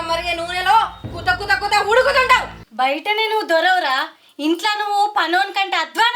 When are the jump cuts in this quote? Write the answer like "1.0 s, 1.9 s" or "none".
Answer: 2.6 s